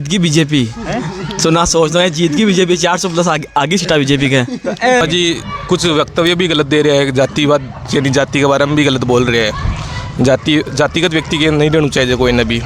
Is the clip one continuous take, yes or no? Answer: no